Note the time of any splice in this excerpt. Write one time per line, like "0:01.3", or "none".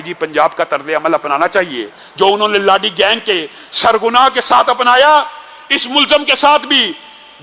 none